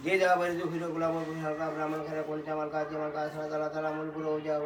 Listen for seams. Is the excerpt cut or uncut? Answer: uncut